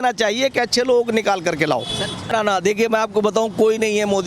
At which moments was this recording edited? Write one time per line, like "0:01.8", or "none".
none